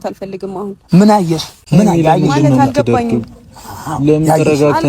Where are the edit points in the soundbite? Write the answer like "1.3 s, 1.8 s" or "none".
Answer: 1.5 s